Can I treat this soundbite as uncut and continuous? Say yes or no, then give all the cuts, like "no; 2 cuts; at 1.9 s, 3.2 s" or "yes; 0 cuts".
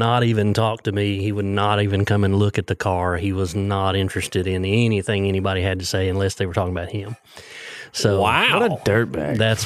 yes; 0 cuts